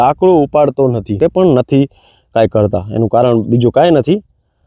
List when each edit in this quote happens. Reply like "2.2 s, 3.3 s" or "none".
1.2 s